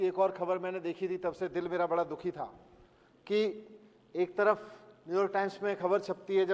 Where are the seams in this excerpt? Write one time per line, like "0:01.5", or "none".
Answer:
none